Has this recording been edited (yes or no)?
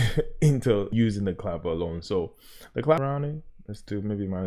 yes